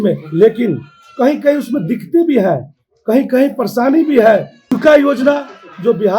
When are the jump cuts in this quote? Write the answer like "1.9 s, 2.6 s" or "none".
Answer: 4.7 s